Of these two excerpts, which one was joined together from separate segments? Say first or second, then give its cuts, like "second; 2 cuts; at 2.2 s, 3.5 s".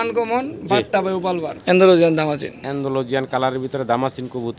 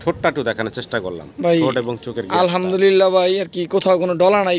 first; 1 cut; at 1.5 s